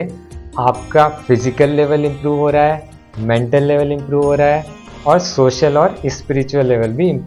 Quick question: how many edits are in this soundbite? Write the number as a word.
zero